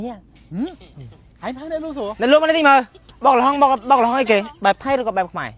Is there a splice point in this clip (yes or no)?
yes